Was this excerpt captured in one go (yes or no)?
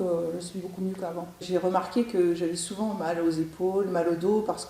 no